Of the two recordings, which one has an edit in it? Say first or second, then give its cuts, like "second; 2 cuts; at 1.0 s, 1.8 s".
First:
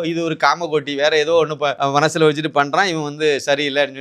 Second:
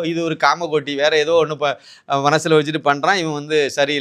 first; 1 cut; at 1.8 s